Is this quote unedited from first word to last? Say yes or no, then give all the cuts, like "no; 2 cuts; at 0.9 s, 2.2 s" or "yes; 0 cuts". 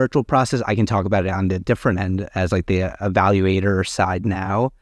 yes; 0 cuts